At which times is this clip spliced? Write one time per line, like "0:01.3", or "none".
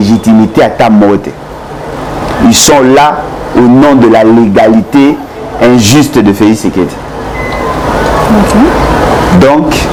none